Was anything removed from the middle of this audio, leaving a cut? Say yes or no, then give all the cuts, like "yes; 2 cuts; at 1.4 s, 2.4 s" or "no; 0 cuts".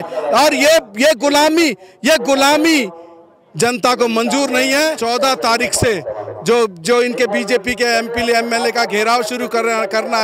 yes; 1 cut; at 5.0 s